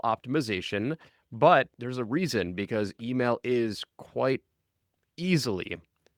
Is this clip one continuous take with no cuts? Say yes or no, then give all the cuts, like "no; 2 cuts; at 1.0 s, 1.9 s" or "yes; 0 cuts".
yes; 0 cuts